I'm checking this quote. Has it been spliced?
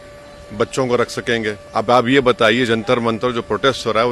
yes; 1 cut; at 1.6 s

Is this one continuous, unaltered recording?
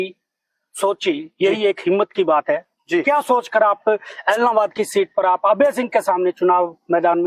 yes; 0 cuts

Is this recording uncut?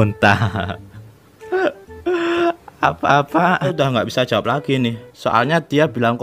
no; 1 cut; at 3.7 s

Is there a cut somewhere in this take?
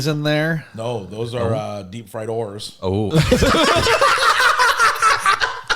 no; 0 cuts

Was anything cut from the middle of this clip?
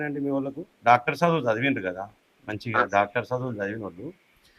no; 0 cuts

